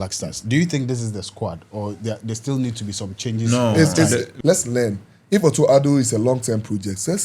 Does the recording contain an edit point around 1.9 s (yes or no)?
no